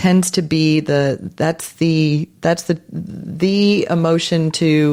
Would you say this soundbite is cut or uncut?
uncut